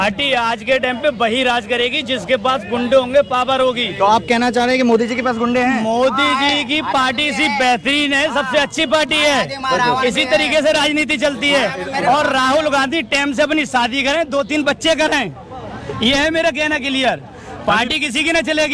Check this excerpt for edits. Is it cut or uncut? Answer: uncut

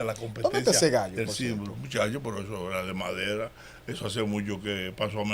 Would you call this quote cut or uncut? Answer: uncut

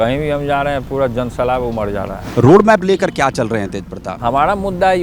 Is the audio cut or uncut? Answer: cut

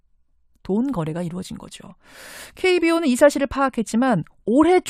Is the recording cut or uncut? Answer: uncut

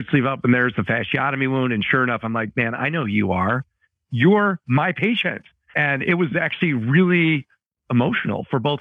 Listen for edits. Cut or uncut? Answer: cut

